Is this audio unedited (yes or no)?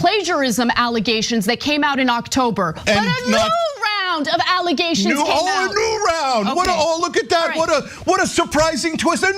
yes